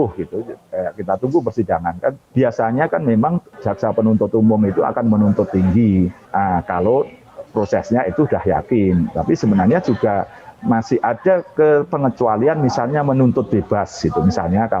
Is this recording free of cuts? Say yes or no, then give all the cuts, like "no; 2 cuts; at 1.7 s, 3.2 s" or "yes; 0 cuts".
no; 3 cuts; at 2.2 s, 3.5 s, 6.2 s